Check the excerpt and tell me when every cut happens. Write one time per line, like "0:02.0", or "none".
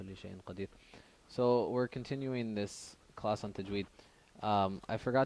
0:02.2